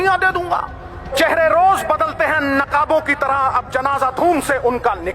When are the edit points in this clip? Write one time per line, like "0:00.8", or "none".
0:01.1